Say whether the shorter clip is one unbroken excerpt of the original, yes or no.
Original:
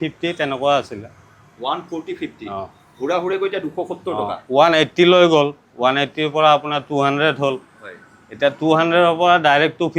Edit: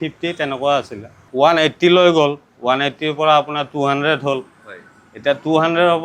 no